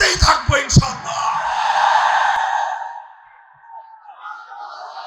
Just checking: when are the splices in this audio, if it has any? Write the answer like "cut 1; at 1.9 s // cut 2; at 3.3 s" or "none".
none

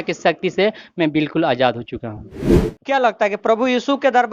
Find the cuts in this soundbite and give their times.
cut 1; at 2.7 s

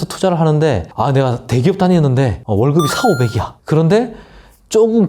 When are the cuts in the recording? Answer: cut 1; at 0.9 s // cut 2; at 2.4 s // cut 3; at 3.5 s

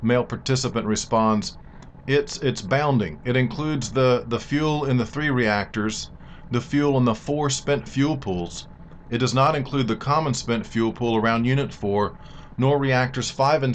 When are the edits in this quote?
cut 1; at 7.2 s

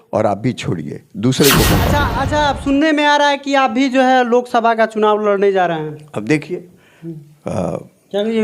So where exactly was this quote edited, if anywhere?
cut 1; at 2.1 s

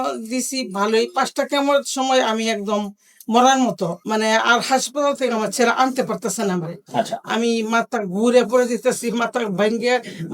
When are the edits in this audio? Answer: cut 1; at 4.0 s

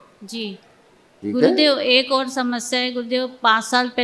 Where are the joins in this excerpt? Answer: cut 1; at 1.0 s

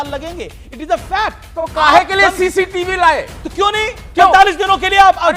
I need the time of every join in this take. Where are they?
cut 1; at 1.6 s

